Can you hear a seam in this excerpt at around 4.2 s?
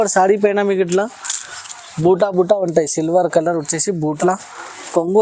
yes; 1 cut; at 4.2 s

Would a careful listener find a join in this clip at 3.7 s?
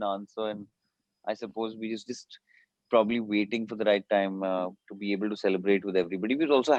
no; 0 cuts

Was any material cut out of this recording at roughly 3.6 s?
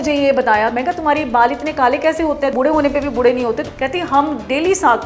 yes; 3 cuts; at 0.7 s, 2.5 s, 3.6 s

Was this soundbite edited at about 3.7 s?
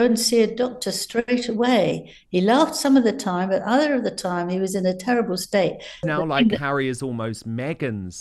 no; 1 cut; at 6.1 s

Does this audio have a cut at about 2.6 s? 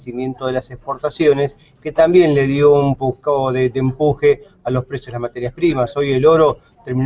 no; 1 cut; at 4.9 s

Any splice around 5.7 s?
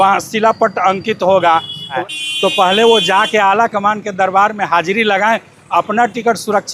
no; 1 cut; at 2.0 s

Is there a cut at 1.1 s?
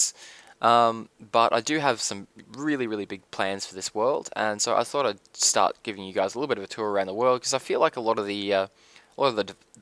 yes; 1 cut; at 1.1 s

